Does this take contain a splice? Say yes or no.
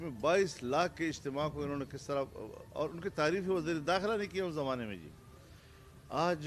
no